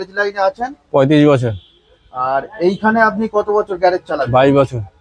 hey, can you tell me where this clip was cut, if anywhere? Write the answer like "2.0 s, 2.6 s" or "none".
none